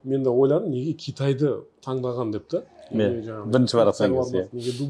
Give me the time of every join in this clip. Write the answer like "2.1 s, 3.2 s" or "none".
none

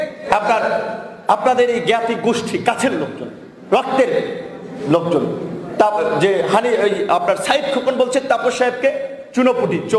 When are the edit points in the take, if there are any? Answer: none

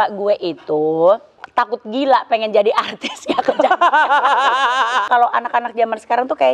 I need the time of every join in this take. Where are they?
1.4 s, 5.1 s

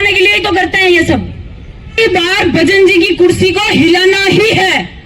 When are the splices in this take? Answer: 2.0 s

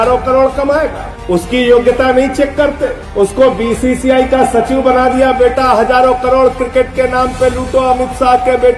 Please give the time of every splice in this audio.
none

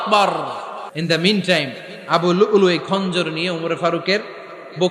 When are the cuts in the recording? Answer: 0.9 s

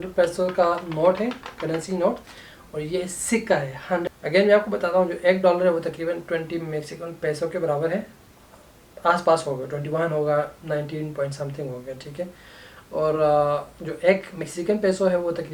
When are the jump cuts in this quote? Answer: 4.0 s

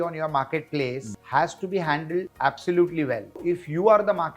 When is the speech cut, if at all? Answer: 1.1 s, 2.3 s, 3.4 s

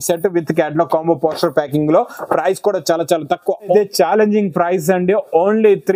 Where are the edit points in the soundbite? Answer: 3.7 s

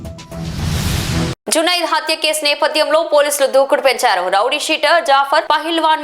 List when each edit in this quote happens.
1.3 s

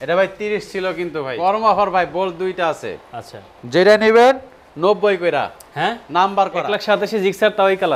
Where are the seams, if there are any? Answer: 1.3 s, 6.7 s

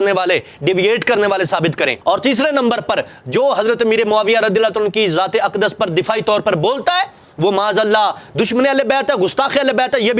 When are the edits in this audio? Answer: none

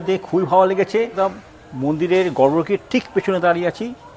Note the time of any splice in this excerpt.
1.1 s

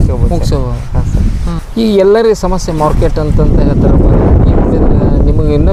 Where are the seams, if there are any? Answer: none

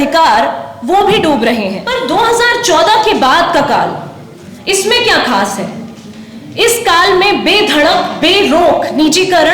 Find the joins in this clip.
1.9 s

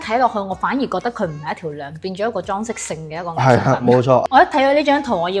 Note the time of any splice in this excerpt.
4.2 s

